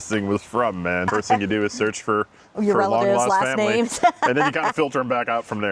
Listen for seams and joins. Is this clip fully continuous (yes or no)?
no